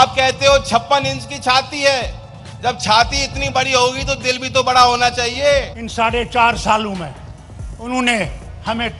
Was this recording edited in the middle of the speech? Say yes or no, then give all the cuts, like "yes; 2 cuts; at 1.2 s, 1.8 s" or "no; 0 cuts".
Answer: yes; 1 cut; at 5.8 s